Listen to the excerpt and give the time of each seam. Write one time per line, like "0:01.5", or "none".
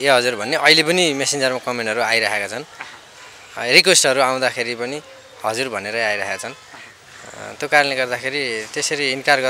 none